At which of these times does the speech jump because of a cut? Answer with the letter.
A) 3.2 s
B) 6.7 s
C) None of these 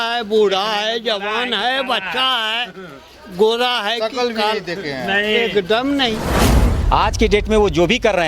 B